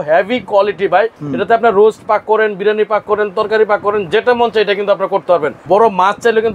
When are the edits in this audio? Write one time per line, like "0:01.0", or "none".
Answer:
0:01.2
0:05.5